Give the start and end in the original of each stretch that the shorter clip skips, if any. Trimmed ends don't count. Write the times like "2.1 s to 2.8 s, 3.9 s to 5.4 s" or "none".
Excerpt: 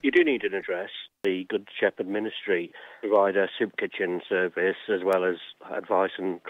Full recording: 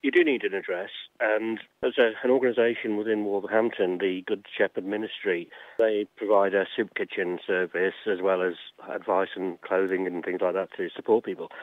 1.2 s to 4.0 s, 5.7 s to 6.1 s